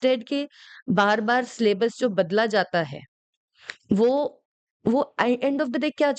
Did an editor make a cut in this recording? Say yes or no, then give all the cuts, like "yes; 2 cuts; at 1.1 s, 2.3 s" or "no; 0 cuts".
no; 0 cuts